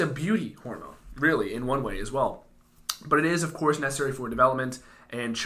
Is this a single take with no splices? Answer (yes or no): yes